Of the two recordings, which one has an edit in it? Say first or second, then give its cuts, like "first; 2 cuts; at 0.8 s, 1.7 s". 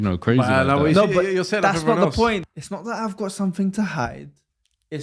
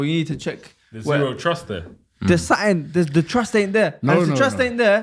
first; 1 cut; at 2.5 s